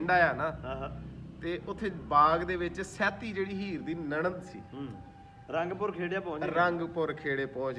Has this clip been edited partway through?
no; 0 cuts

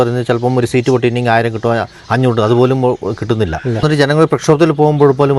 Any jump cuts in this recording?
yes; 1 cut; at 3.8 s

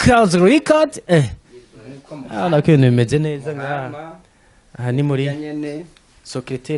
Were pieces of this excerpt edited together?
no; 0 cuts

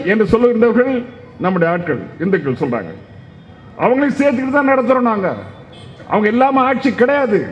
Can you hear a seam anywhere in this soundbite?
no; 0 cuts

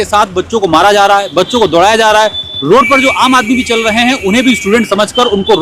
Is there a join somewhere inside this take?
no; 0 cuts

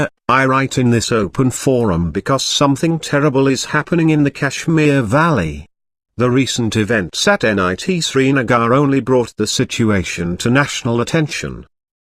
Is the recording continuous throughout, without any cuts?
no; 1 cut; at 4.2 s

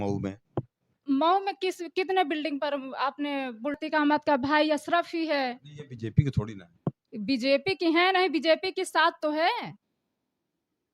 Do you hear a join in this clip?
yes; 1 cut; at 3.8 s

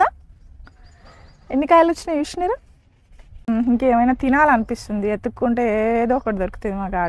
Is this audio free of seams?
no; 1 cut; at 3.5 s

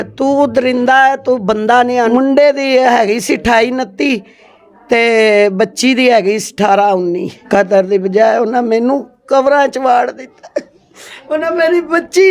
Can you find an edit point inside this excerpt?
yes; 2 cuts; at 2.1 s, 7.3 s

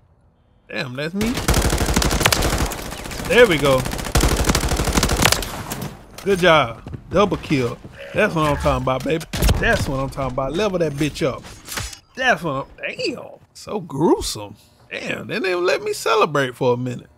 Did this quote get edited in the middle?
no; 0 cuts

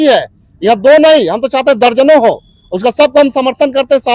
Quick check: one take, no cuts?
yes; 0 cuts

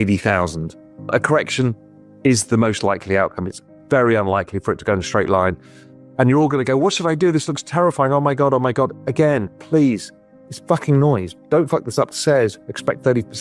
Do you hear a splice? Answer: yes; 1 cut; at 1.1 s

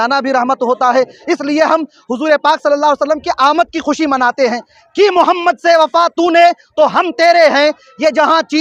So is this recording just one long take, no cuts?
no; 1 cut; at 4.7 s

